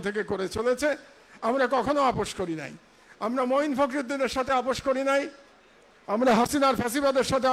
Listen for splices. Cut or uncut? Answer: uncut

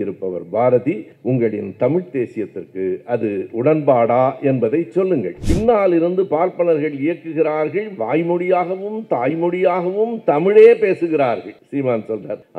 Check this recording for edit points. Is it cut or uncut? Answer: cut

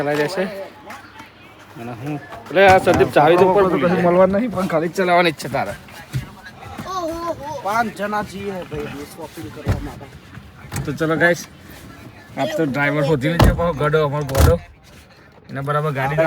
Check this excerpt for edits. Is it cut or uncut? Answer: cut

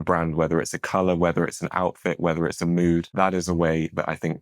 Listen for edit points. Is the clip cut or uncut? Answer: cut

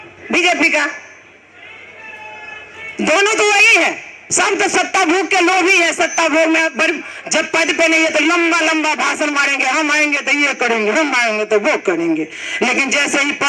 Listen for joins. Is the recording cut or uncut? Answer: uncut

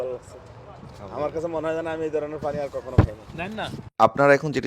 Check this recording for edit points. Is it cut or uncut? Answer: cut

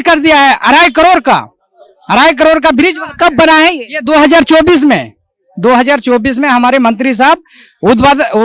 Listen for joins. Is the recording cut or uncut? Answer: uncut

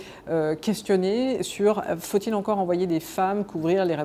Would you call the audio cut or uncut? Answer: uncut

